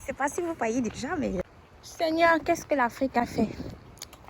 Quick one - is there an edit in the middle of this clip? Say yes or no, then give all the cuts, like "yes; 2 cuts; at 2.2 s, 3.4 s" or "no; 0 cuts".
yes; 1 cut; at 1.5 s